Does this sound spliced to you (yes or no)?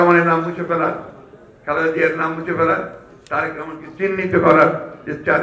no